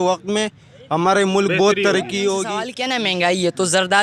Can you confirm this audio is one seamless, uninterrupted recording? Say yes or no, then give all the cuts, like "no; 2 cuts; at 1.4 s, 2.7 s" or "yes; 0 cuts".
no; 1 cut; at 2.7 s